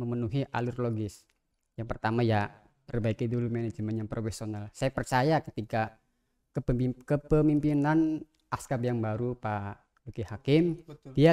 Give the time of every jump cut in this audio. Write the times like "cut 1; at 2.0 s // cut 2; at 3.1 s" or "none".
none

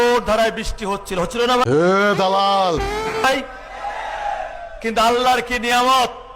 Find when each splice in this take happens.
none

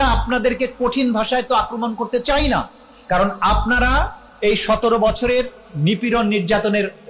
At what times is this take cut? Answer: none

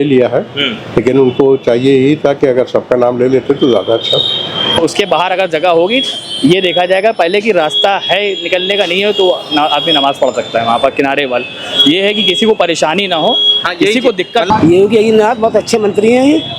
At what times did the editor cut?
cut 1; at 4.8 s // cut 2; at 14.5 s

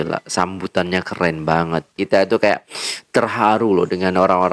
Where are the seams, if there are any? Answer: cut 1; at 2.0 s

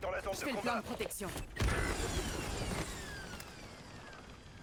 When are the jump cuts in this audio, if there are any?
none

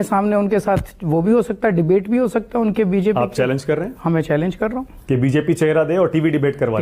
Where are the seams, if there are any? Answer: none

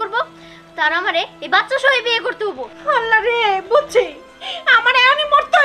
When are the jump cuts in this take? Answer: none

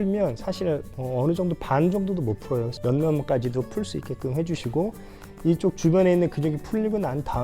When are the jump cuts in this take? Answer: cut 1; at 0.9 s // cut 2; at 2.7 s

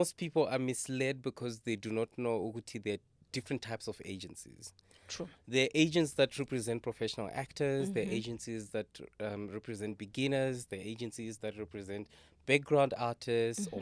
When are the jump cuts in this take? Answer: none

